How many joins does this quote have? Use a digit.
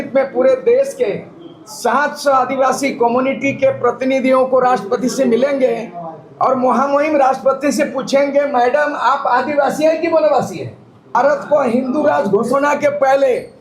1